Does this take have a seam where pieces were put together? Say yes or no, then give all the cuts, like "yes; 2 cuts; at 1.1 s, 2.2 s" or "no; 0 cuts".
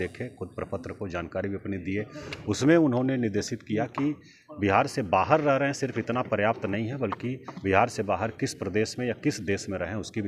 no; 0 cuts